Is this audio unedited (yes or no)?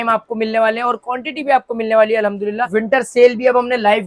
no